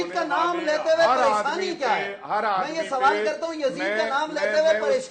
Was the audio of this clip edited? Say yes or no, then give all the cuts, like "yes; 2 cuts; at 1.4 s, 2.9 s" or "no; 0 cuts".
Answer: no; 0 cuts